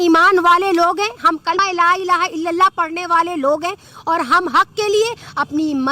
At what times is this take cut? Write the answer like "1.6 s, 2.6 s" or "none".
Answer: 1.6 s